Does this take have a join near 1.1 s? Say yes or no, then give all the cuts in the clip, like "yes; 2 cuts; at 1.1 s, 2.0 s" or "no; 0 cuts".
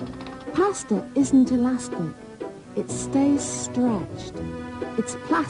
yes; 1 cut; at 1.1 s